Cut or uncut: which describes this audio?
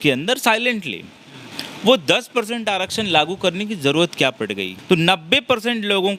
cut